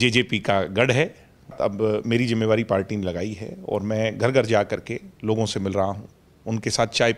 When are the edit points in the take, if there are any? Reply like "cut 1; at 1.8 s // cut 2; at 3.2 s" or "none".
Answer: cut 1; at 1.6 s